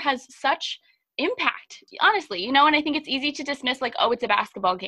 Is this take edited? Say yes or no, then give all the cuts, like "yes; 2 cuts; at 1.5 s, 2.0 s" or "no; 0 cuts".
yes; 1 cut; at 1.9 s